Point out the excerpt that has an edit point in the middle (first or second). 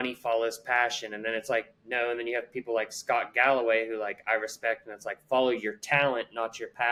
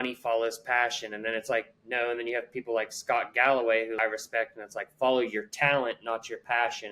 second